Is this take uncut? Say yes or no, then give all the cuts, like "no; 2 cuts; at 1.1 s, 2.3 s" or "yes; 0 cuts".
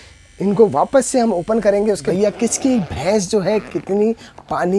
no; 1 cut; at 2.0 s